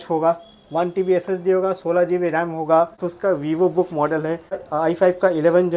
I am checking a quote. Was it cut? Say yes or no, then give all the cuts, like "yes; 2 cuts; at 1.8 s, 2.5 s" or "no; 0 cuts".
yes; 2 cuts; at 3.1 s, 4.6 s